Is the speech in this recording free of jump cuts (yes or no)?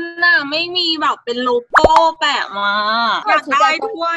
no